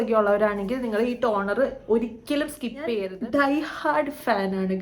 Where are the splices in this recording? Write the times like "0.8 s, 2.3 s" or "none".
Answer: 2.9 s